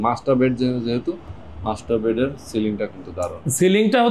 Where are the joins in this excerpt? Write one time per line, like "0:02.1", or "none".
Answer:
none

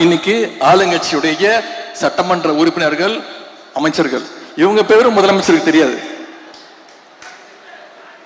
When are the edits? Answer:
none

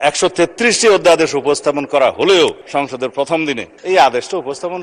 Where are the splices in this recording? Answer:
none

